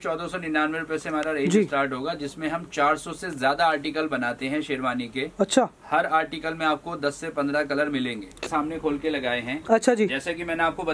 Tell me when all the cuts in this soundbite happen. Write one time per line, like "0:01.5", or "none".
0:08.4